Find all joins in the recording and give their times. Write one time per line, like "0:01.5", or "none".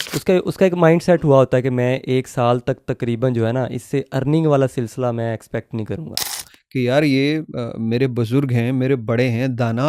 0:06.5

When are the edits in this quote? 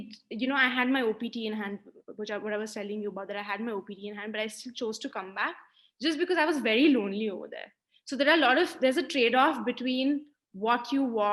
none

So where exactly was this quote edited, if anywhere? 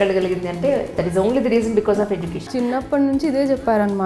0:02.4

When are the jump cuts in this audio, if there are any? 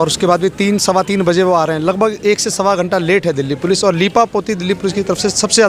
none

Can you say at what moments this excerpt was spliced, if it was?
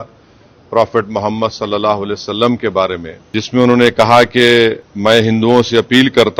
0:03.1
0:04.9

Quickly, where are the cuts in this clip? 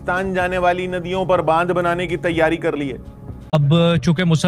0:03.5

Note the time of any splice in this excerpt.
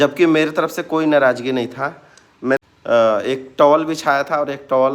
0:02.6

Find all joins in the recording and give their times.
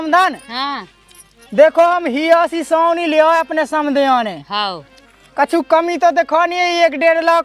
none

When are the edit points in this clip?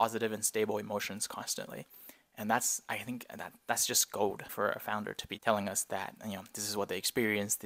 0:04.9

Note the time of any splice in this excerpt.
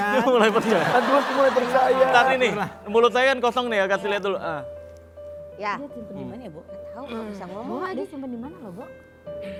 none

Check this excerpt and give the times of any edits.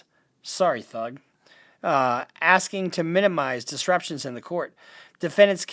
none

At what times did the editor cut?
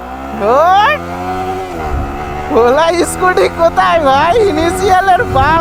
none

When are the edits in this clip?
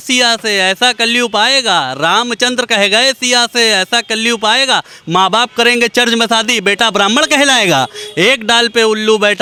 none

